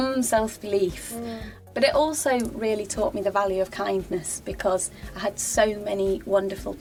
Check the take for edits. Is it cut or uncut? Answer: uncut